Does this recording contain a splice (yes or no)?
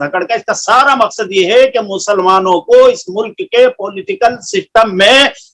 no